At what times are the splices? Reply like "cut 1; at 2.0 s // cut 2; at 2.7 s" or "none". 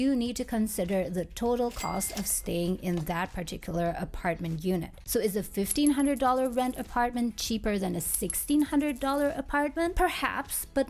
cut 1; at 5.0 s // cut 2; at 9.9 s

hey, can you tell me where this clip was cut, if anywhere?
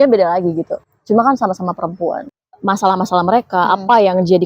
cut 1; at 2.2 s

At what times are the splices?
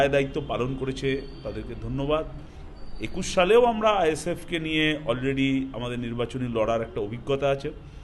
none

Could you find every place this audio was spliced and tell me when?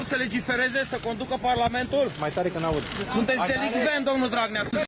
cut 1; at 3.7 s

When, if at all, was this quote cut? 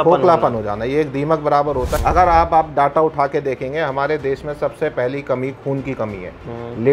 cut 1; at 1.9 s

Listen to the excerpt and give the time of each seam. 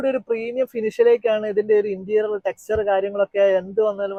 none

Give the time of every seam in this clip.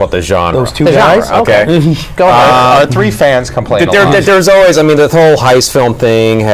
cut 1; at 3.2 s

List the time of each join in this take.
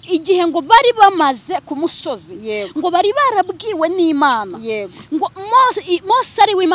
none

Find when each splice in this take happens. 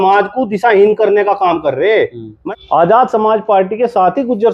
cut 1; at 2.3 s

